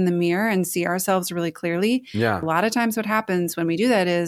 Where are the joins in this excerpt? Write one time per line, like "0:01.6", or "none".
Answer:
0:02.4